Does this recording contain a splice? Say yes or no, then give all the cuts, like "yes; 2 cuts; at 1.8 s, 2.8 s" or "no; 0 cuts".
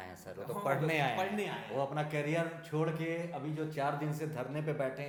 no; 0 cuts